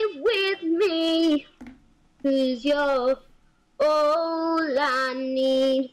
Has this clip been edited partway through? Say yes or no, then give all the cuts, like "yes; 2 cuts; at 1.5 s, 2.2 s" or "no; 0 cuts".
no; 0 cuts